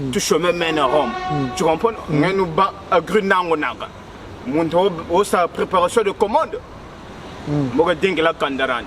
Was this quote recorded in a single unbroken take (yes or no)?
yes